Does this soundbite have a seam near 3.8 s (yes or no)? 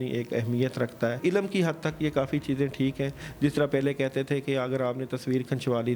no